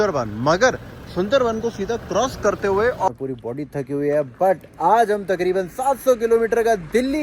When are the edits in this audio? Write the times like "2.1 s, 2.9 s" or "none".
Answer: 3.1 s